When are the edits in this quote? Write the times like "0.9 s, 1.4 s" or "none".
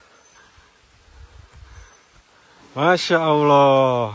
2.6 s